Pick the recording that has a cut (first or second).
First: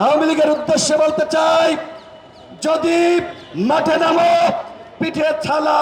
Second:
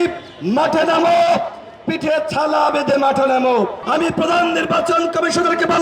second